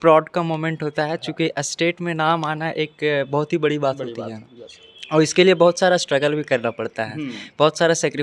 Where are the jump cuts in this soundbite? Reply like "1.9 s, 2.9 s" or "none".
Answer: none